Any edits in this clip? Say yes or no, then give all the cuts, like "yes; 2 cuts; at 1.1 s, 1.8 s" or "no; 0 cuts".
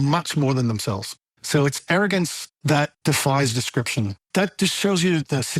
yes; 2 cuts; at 2.7 s, 4.2 s